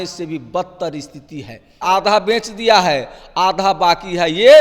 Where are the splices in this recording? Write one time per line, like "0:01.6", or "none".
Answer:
0:01.8